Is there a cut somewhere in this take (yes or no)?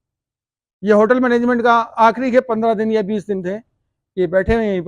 no